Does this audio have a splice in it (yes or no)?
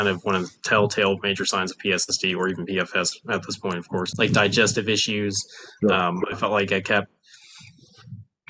yes